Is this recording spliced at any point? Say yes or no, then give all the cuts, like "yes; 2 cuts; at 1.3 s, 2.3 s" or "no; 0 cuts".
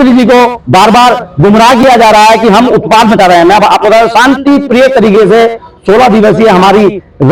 no; 0 cuts